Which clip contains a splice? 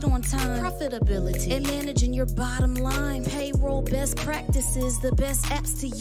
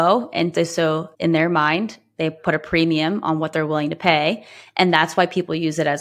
second; 1 cut; at 1.1 s

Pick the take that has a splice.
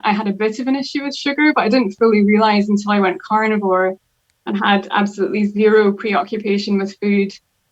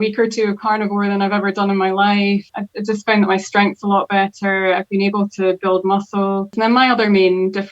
second; 2 cuts; at 2.5 s, 6.5 s

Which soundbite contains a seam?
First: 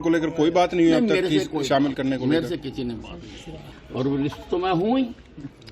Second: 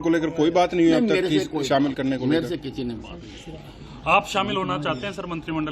first; 1 cut; at 3.7 s

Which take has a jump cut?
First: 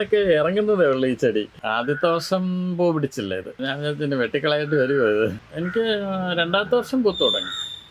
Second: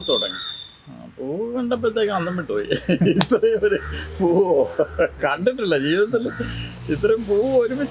first; 3 cuts; at 1.6 s, 3.6 s, 5.4 s

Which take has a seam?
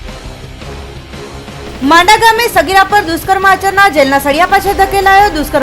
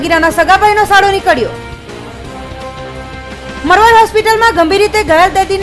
first; 1 cut; at 1.7 s

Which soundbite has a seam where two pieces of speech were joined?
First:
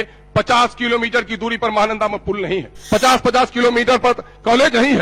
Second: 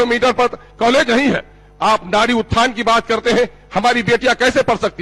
first; 1 cut; at 2.7 s

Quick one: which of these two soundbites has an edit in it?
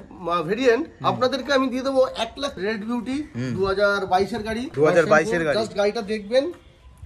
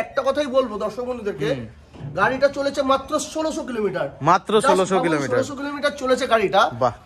first; 2 cuts; at 2.6 s, 4.7 s

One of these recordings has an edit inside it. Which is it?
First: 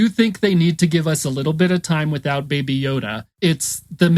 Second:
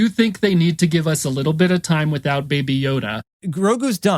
second; 1 cut; at 3.3 s

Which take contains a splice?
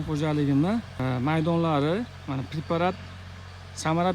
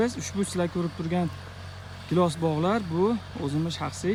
first; 1 cut; at 1.0 s

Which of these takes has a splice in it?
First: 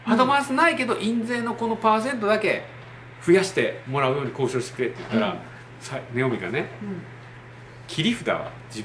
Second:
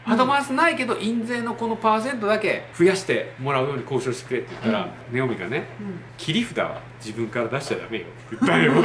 second; 3 cuts; at 2.7 s, 5.0 s, 6.1 s

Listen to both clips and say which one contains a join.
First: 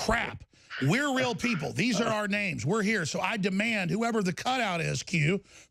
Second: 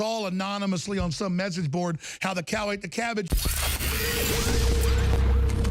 second; 1 cut; at 3.3 s

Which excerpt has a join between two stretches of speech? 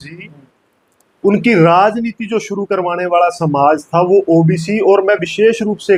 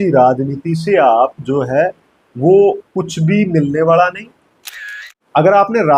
second; 1 cut; at 4.7 s

